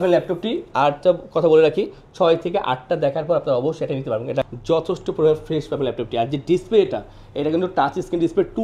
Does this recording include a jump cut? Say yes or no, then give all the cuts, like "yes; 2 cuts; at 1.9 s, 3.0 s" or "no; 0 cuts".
yes; 1 cut; at 4.4 s